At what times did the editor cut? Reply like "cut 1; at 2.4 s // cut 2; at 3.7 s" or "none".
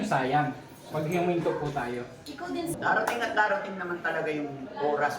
cut 1; at 2.7 s